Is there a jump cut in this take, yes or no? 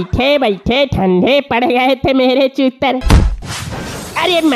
yes